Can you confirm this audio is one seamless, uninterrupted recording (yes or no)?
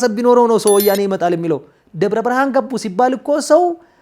yes